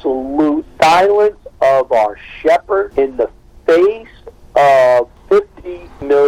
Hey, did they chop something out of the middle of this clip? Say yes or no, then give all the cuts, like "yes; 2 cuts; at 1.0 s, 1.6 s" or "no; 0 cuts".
no; 0 cuts